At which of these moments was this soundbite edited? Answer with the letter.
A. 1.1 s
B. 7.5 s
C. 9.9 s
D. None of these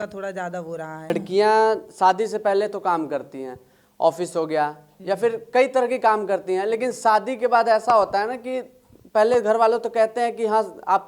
A